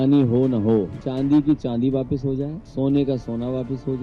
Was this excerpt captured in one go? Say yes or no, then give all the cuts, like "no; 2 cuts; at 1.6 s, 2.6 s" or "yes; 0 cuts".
no; 2 cuts; at 1.0 s, 2.6 s